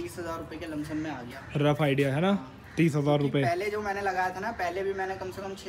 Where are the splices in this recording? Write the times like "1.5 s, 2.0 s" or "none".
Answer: none